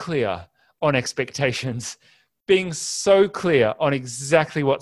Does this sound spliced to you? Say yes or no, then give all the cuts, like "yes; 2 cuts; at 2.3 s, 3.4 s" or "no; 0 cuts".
no; 0 cuts